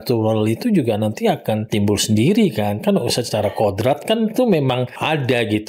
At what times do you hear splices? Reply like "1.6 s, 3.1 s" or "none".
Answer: 1.7 s